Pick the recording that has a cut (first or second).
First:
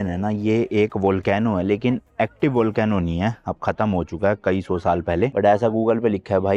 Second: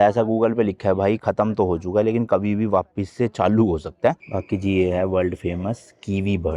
second